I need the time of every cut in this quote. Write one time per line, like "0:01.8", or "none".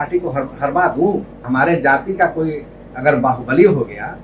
0:01.4